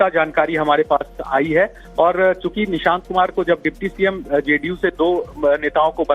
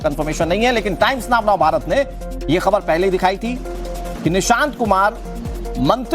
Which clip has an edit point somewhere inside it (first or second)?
second